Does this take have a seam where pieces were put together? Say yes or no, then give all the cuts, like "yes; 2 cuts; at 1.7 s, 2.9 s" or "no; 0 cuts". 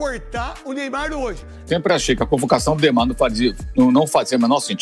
yes; 1 cut; at 1.5 s